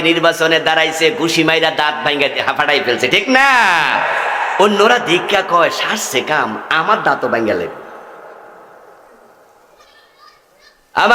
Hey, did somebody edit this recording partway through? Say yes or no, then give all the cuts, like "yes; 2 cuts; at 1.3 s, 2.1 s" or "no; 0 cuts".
no; 0 cuts